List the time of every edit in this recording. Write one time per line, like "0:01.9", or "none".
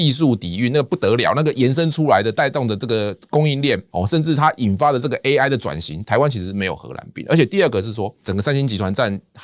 0:08.2